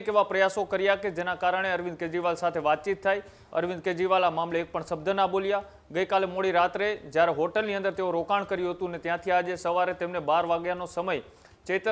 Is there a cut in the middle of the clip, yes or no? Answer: no